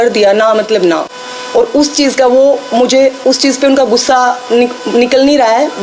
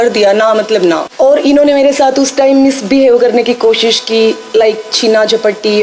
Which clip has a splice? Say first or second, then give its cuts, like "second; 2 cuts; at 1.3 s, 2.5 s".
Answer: second; 1 cut; at 1.1 s